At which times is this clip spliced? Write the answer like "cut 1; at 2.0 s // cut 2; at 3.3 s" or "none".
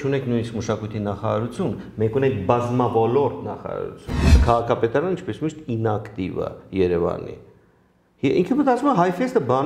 cut 1; at 4.3 s